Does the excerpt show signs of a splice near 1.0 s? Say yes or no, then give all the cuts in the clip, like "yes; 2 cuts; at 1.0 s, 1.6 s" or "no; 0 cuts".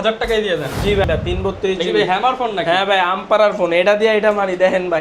yes; 1 cut; at 1.0 s